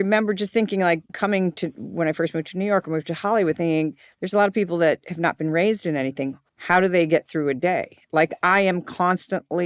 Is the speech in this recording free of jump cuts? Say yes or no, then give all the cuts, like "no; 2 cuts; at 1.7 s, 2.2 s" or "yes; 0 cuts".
no; 1 cut; at 1.1 s